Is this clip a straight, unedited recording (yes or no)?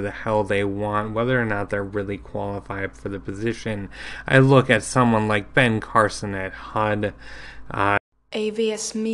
no